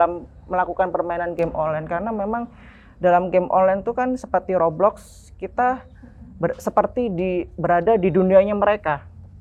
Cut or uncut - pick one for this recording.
uncut